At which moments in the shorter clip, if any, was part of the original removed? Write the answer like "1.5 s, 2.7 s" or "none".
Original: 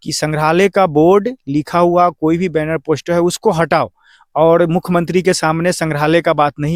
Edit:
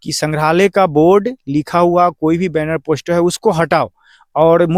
none